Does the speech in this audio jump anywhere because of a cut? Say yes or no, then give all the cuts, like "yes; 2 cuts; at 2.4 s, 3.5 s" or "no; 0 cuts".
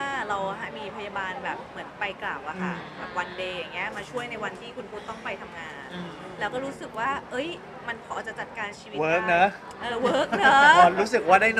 no; 0 cuts